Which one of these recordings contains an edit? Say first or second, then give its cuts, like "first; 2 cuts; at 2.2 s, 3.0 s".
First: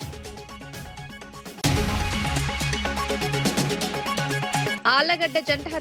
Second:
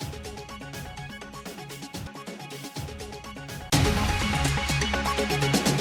first; 2 cuts; at 1.6 s, 4.8 s